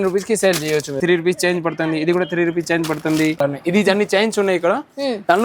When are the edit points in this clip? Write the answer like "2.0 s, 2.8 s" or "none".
1.0 s, 3.4 s